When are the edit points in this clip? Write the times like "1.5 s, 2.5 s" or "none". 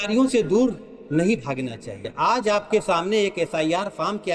2.1 s